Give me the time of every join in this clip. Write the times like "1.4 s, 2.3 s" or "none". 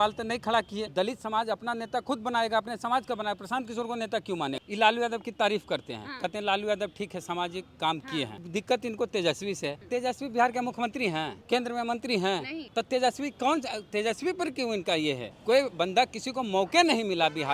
0.9 s, 4.6 s, 8.4 s, 9.8 s, 11.4 s, 12.6 s, 15.3 s